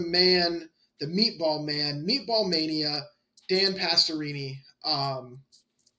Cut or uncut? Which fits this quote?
uncut